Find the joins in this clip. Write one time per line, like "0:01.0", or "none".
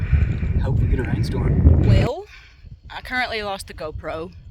0:01.9